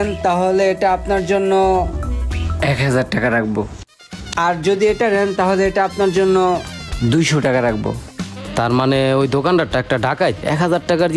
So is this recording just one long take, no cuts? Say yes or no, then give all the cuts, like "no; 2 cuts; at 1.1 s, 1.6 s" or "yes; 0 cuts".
yes; 0 cuts